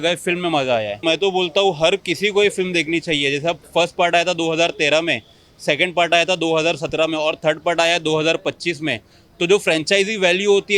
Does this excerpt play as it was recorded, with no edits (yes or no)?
yes